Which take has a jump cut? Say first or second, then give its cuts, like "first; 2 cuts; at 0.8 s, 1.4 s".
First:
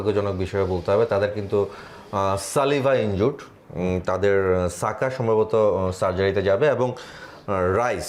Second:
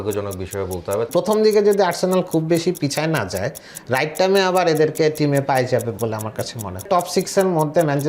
second; 2 cuts; at 1.1 s, 6.9 s